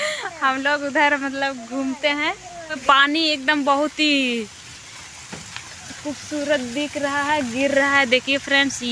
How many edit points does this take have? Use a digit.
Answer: 1